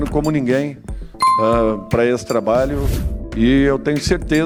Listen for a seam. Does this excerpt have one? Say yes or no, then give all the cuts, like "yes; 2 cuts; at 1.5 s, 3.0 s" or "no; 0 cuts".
no; 0 cuts